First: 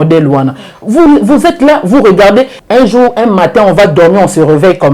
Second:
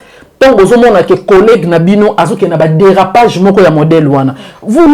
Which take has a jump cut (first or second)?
first